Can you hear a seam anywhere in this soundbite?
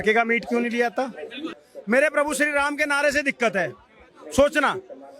yes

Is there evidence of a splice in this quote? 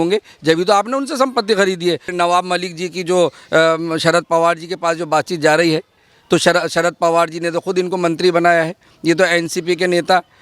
yes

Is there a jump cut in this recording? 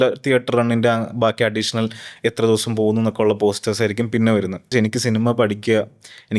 yes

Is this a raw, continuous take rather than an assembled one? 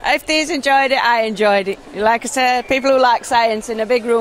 yes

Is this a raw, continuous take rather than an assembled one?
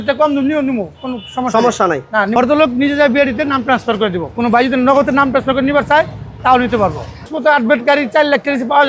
no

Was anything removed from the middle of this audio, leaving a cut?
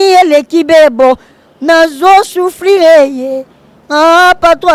no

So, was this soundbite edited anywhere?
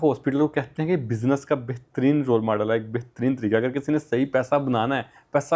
no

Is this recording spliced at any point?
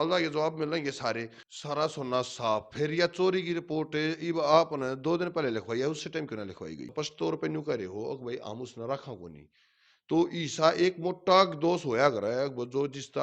yes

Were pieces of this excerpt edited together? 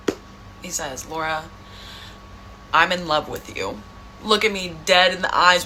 no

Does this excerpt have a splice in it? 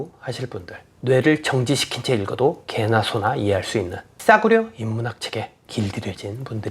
yes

